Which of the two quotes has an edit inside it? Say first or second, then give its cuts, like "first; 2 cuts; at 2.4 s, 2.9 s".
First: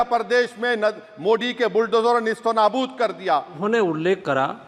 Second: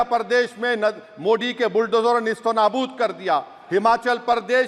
first; 1 cut; at 3.5 s